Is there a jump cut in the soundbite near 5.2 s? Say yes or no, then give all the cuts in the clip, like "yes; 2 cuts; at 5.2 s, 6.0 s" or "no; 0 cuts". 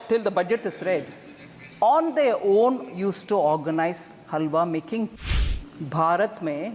yes; 1 cut; at 5.2 s